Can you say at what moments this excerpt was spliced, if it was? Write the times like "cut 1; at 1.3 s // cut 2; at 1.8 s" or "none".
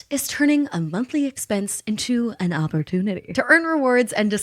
cut 1; at 3.2 s